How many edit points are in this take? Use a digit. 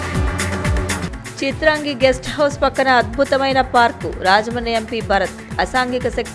1